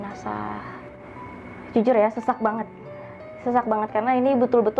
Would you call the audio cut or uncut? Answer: cut